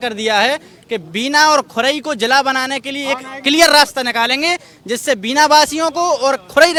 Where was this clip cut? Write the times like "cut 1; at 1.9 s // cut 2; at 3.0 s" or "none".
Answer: none